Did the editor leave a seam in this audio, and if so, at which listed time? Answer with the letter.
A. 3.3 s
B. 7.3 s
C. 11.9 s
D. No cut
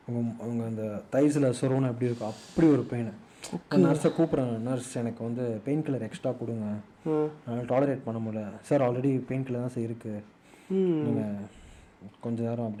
D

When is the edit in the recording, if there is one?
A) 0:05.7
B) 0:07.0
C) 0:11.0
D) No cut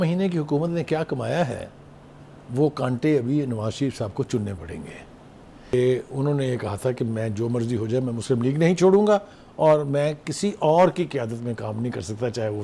A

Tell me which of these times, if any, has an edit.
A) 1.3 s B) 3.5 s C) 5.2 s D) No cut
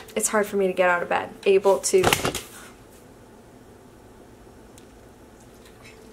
A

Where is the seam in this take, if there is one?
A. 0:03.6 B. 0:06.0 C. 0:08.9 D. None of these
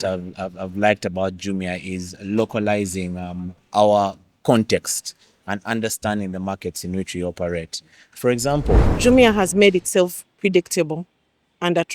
C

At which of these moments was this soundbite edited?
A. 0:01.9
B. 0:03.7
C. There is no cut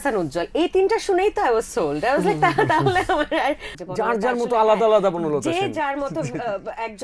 B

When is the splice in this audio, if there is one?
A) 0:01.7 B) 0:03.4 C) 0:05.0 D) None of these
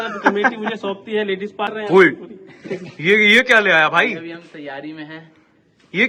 A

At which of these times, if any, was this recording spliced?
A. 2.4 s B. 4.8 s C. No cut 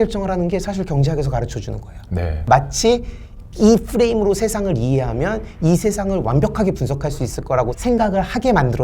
A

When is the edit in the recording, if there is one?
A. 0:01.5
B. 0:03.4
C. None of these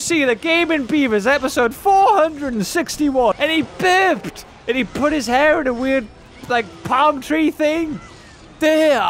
B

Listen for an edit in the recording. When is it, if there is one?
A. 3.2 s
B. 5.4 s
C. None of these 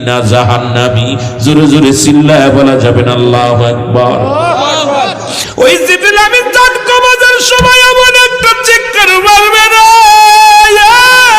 B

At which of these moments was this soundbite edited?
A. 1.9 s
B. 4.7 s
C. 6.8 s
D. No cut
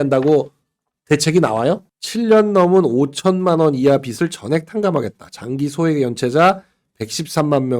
A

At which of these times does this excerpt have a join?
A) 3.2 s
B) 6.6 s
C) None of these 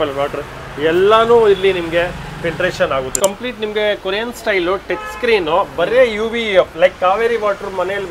A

